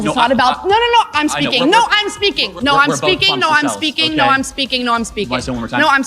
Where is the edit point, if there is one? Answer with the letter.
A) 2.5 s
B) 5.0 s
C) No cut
A